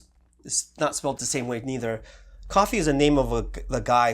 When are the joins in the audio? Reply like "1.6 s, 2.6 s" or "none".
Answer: 1.2 s